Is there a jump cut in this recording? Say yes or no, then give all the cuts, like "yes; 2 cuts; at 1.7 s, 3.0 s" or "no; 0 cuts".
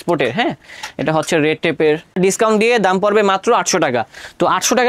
yes; 1 cut; at 2.2 s